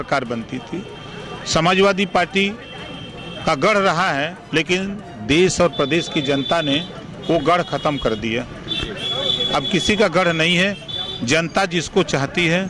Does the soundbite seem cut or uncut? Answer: uncut